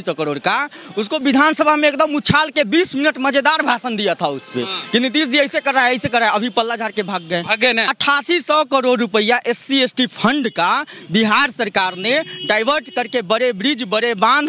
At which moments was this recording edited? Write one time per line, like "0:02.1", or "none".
0:07.9